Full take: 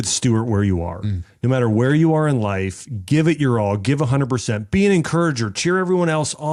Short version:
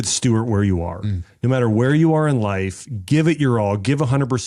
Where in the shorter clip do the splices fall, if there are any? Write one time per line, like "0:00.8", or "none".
none